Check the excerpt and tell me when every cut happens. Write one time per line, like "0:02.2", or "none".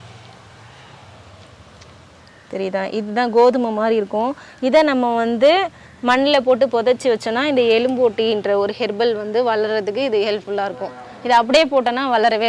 none